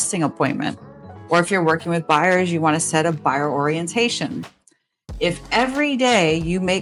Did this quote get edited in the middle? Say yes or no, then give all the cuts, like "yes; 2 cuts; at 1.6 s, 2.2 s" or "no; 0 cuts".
no; 0 cuts